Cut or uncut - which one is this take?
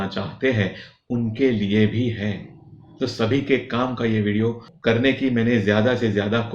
cut